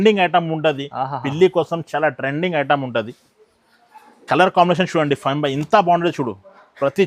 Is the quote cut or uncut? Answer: uncut